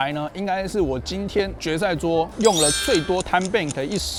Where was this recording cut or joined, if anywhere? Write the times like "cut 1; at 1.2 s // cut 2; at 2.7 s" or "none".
none